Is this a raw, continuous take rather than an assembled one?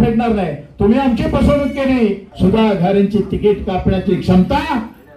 no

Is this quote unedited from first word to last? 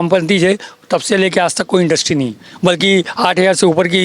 yes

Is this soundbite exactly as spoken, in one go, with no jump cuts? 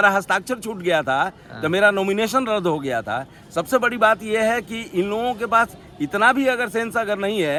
yes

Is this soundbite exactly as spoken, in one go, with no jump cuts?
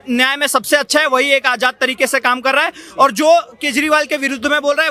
yes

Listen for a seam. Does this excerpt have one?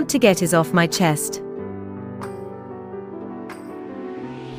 no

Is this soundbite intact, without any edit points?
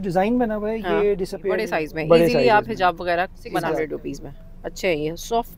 no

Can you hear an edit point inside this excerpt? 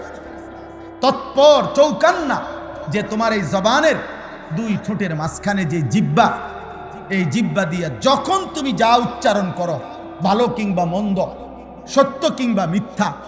no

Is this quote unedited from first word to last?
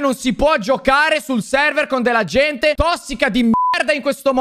yes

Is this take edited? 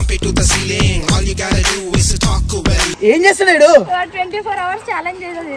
yes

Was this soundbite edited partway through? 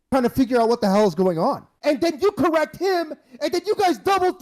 yes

